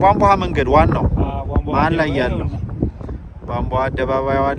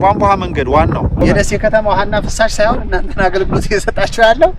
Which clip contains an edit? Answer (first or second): second